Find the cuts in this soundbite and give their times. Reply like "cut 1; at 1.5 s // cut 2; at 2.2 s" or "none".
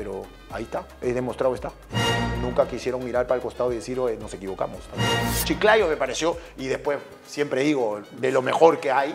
cut 1; at 1.0 s // cut 2; at 5.3 s